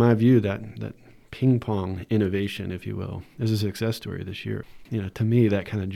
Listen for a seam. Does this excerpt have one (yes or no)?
yes